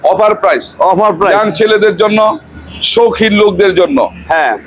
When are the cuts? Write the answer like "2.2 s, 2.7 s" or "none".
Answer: none